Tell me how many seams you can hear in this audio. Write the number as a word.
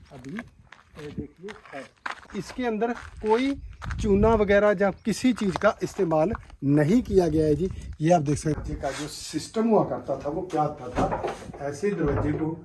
two